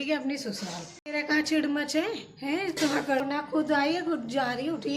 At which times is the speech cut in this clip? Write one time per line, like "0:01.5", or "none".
0:01.1
0:03.2